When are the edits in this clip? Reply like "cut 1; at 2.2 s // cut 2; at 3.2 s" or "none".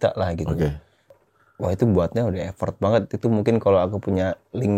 cut 1; at 1.2 s